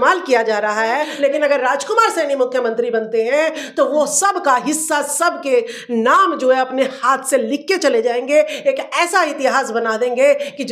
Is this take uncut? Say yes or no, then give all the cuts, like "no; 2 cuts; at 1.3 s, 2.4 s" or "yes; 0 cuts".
no; 1 cut; at 1.1 s